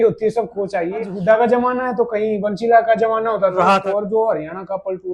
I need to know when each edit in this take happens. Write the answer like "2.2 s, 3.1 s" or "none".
1.1 s, 3.7 s